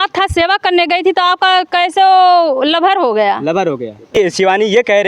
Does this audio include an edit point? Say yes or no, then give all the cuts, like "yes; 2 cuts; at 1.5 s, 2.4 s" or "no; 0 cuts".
yes; 1 cut; at 4.2 s